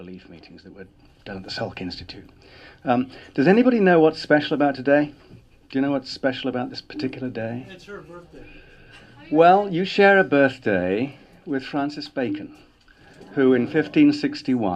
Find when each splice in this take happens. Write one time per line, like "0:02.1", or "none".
0:08.8